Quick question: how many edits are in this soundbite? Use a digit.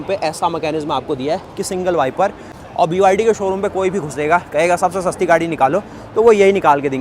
1